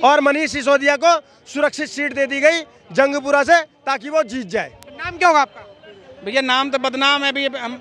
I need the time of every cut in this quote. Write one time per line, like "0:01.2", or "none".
none